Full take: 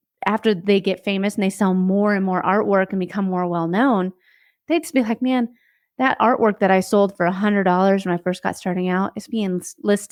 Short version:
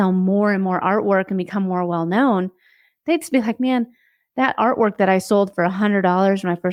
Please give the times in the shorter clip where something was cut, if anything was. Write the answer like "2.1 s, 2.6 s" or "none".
none